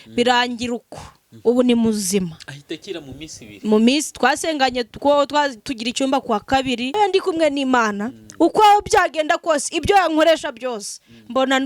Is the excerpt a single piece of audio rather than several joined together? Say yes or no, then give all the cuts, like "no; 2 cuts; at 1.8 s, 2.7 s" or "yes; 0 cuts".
no; 1 cut; at 7.0 s